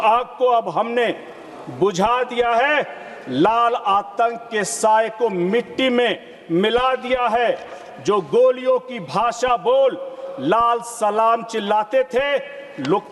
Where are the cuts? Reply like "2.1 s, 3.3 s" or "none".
none